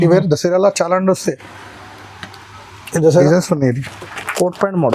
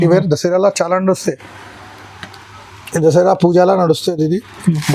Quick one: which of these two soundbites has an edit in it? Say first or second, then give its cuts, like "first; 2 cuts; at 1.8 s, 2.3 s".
first; 1 cut; at 3.2 s